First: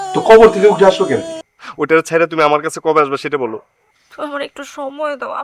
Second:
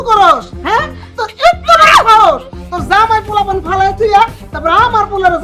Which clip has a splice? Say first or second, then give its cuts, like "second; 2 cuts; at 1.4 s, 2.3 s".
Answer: first; 1 cut; at 1.4 s